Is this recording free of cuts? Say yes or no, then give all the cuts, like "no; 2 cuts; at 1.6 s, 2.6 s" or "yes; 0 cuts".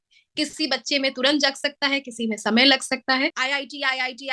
no; 1 cut; at 3.4 s